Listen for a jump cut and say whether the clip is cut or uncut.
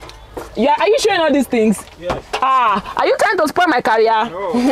uncut